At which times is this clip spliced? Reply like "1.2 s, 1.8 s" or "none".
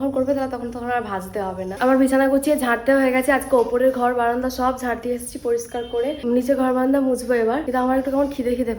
none